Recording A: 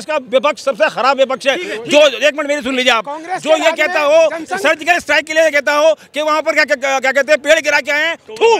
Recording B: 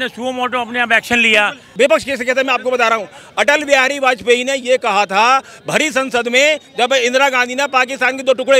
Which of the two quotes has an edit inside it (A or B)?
B